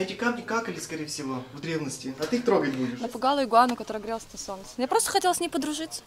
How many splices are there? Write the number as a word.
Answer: one